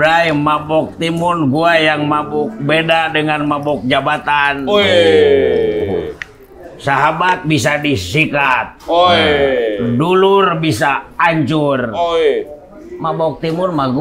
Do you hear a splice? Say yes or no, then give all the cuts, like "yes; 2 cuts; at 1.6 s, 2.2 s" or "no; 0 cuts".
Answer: no; 0 cuts